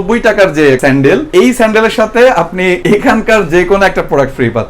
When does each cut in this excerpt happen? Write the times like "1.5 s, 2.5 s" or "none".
0.9 s, 2.8 s